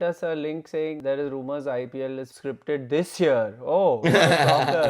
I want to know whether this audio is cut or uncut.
cut